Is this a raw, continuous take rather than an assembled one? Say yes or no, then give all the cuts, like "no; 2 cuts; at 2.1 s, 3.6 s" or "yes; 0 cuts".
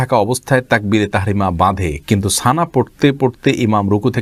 yes; 0 cuts